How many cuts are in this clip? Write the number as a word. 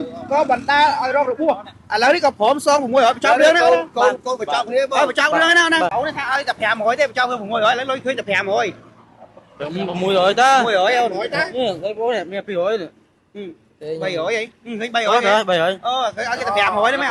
one